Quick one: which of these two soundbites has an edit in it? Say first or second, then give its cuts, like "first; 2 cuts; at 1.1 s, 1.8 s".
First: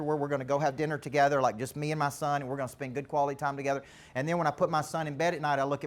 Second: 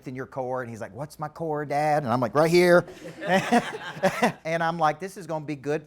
second; 1 cut; at 4.4 s